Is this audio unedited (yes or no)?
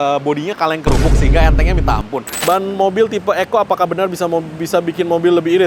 no